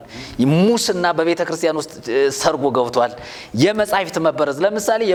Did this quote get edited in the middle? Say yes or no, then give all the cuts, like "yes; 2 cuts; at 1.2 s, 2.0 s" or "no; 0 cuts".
no; 0 cuts